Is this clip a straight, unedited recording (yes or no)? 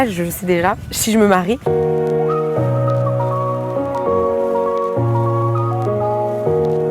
no